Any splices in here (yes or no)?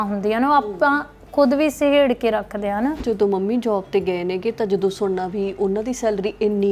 yes